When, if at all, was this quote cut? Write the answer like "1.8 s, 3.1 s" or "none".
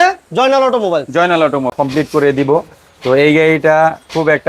1.8 s